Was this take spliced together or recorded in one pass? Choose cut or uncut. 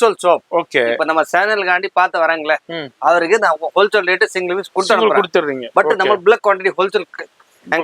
uncut